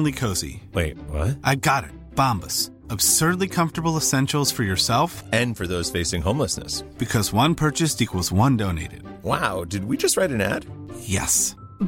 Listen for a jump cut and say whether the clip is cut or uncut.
uncut